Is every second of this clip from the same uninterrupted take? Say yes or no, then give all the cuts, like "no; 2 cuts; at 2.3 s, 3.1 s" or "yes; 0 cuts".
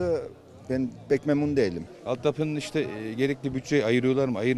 no; 1 cut; at 1.9 s